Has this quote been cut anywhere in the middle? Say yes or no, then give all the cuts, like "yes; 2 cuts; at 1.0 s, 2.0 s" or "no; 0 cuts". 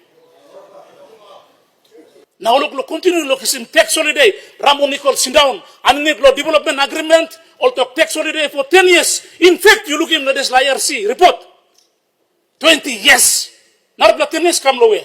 yes; 1 cut; at 2.2 s